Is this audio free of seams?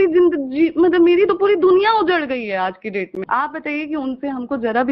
no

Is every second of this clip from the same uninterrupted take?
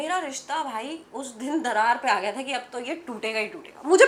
yes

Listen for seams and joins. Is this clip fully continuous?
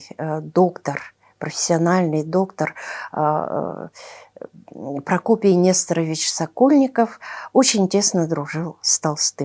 yes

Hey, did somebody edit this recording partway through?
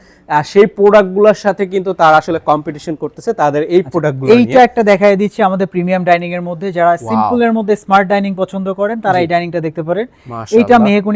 no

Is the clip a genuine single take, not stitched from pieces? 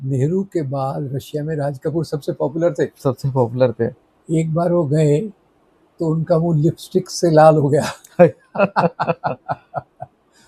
yes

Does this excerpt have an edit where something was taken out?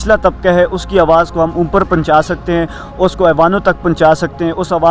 no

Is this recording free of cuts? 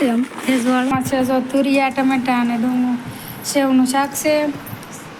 no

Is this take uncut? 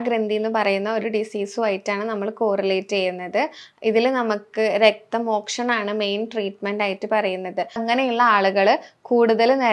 no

